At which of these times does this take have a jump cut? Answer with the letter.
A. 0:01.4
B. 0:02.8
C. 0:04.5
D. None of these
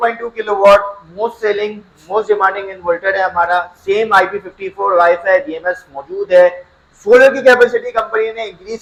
D